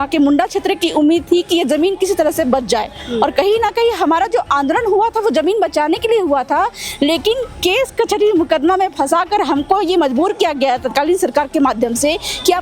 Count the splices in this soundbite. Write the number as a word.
zero